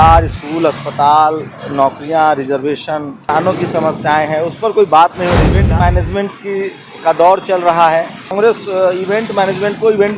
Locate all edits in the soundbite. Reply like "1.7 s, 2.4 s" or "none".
3.3 s, 5.5 s, 8.3 s